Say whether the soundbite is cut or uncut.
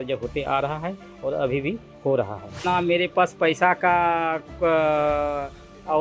cut